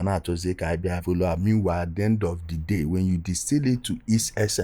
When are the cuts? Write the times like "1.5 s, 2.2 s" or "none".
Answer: 1.0 s